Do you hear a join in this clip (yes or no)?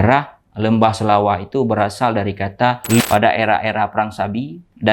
yes